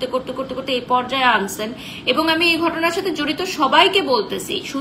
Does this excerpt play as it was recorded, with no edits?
yes; 0 cuts

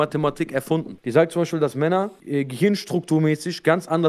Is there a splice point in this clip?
yes; 2 cuts; at 1.0 s, 2.2 s

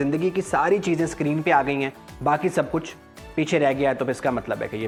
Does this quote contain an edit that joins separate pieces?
no; 0 cuts

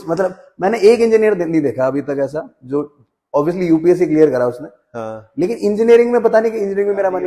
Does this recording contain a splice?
no; 0 cuts

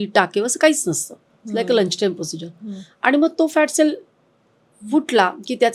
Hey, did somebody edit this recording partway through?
no; 0 cuts

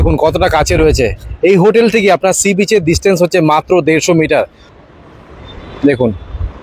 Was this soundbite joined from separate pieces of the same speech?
yes; 1 cut; at 4.6 s

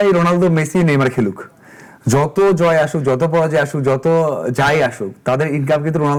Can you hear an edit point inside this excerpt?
no; 0 cuts

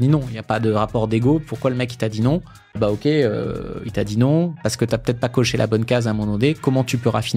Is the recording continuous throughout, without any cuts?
no; 1 cut; at 2.8 s

